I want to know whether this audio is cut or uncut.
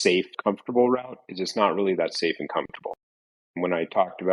uncut